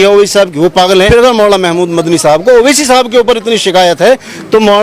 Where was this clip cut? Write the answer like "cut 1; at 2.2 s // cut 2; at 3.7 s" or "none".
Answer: cut 1; at 1.1 s